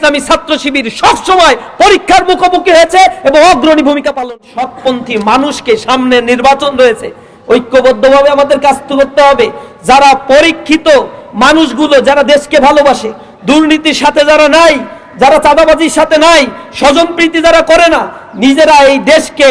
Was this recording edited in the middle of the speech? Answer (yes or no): yes